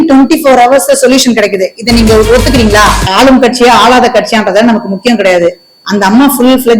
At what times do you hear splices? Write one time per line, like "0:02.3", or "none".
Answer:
0:03.0